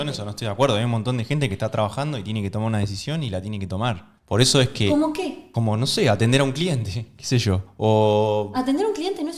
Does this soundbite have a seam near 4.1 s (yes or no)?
no